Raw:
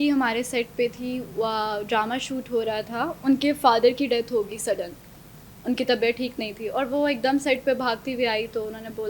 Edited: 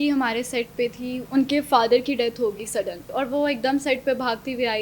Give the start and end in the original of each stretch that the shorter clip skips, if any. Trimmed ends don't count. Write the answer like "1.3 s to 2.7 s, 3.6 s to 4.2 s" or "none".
1.2 s to 3.2 s, 4.9 s to 6.6 s